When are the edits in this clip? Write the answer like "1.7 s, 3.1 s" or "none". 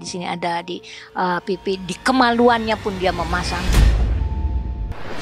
3.7 s

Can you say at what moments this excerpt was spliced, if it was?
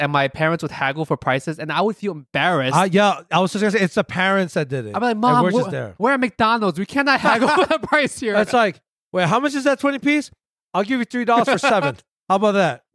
none

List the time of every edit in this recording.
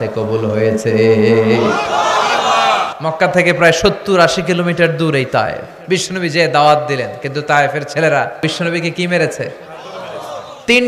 2.9 s, 5.7 s, 8.4 s

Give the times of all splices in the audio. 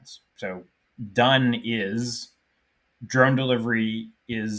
none

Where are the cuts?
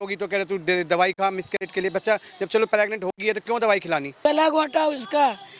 4.1 s

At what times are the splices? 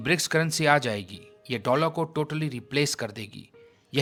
none

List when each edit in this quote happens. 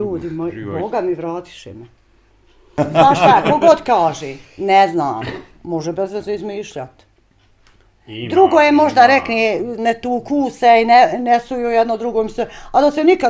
2.7 s

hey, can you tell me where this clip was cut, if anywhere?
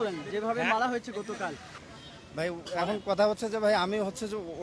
1.7 s

